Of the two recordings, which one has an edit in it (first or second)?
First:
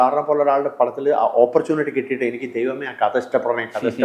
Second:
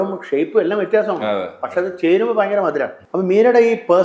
second